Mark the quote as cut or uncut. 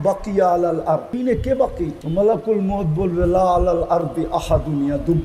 cut